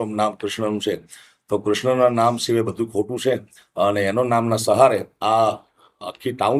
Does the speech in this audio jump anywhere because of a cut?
no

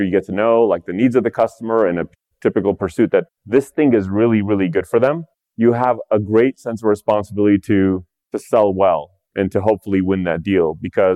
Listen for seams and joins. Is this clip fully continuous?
yes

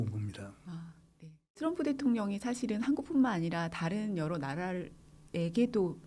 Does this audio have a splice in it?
no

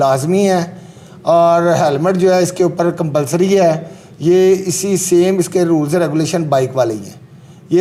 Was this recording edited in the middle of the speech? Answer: no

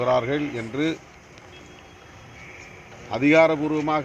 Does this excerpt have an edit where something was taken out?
no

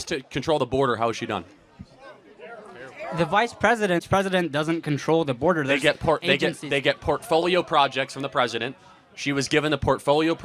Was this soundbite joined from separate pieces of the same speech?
yes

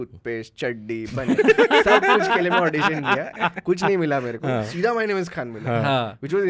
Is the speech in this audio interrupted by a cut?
no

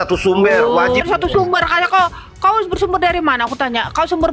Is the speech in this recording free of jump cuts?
no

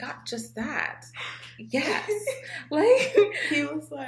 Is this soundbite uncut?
yes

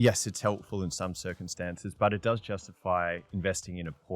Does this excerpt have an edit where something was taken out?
yes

